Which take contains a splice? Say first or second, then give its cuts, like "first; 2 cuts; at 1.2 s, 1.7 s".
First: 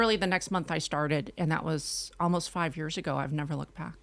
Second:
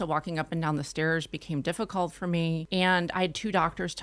second; 1 cut; at 2.6 s